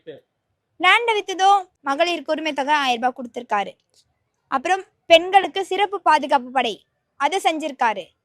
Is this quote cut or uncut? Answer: cut